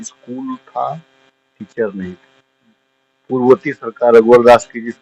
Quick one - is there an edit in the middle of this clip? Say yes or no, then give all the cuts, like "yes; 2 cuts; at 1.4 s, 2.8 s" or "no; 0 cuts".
no; 0 cuts